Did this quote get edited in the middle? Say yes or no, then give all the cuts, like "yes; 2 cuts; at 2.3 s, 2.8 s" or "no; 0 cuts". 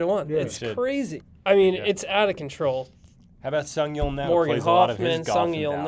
yes; 1 cut; at 1.2 s